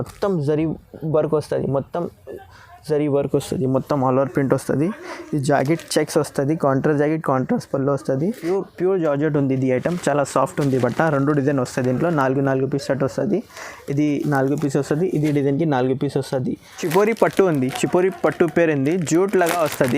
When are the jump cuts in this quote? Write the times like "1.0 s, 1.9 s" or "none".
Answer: 8.4 s, 16.7 s